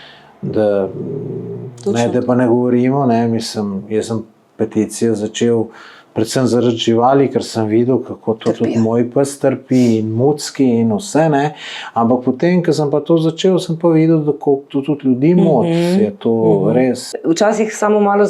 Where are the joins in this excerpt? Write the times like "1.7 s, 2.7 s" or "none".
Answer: 17.1 s